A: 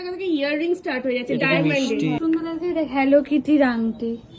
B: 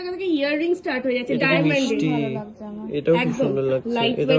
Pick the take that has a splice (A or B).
A